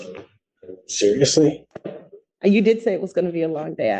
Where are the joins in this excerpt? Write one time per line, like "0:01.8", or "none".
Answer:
0:02.3